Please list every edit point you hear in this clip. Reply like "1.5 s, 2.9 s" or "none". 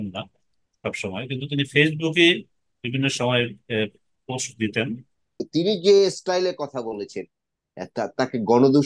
5.4 s

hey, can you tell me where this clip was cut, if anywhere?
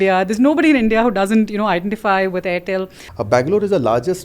3.0 s

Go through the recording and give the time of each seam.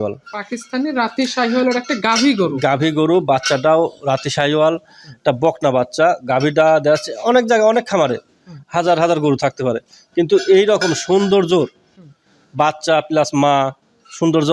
none

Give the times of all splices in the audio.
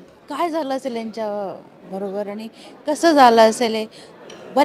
none

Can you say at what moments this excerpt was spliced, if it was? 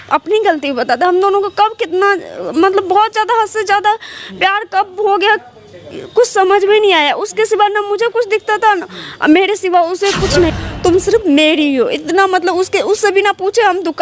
10.5 s

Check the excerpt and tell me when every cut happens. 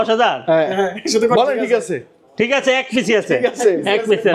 none

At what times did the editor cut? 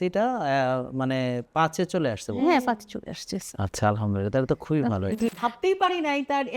5.3 s

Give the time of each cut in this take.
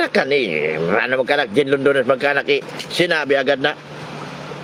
none

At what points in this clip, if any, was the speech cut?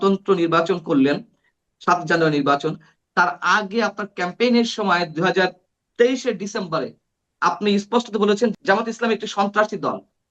8.5 s

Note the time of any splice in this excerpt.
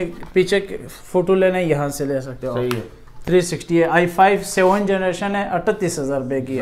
none

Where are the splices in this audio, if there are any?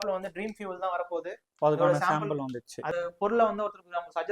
2.9 s

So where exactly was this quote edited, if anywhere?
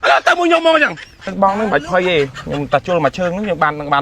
1.3 s

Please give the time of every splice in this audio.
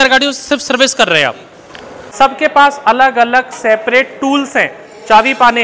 2.0 s

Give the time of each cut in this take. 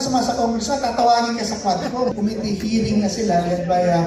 2.1 s

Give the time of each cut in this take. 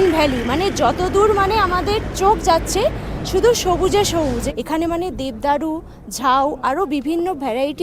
none

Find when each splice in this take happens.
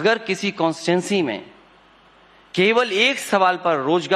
3.1 s

